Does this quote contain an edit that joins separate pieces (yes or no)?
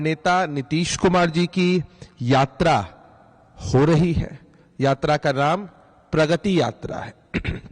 yes